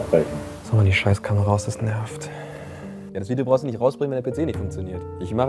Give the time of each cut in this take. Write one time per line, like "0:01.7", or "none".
none